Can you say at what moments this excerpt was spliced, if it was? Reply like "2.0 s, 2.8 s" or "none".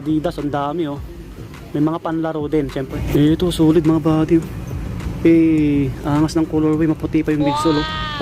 3.0 s